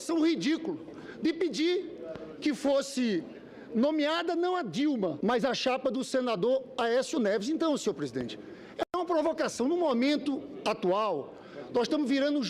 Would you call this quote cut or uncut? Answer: cut